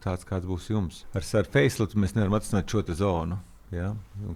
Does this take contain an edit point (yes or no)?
yes